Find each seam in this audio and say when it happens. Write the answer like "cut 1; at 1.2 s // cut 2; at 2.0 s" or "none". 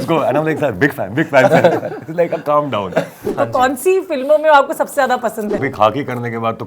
cut 1; at 3.2 s // cut 2; at 5.6 s